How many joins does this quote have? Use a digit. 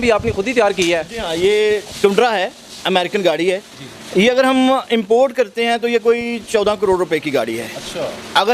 0